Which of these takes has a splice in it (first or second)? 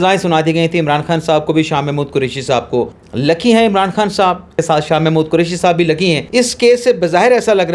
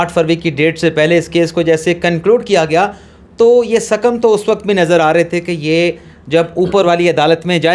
first